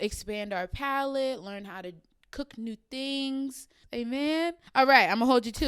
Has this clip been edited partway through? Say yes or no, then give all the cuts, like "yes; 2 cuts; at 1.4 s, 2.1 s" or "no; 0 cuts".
yes; 1 cut; at 4.6 s